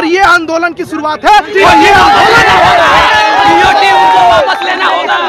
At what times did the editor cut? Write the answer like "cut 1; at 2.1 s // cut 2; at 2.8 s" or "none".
none